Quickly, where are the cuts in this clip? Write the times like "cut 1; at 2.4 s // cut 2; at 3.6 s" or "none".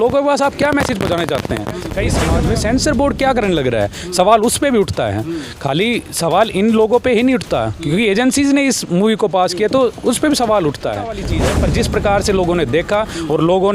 cut 1; at 2.2 s // cut 2; at 11.3 s